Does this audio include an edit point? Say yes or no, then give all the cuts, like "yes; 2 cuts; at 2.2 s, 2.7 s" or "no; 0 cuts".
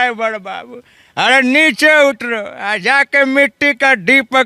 no; 0 cuts